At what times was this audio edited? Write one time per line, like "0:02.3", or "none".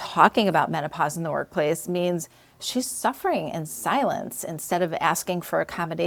none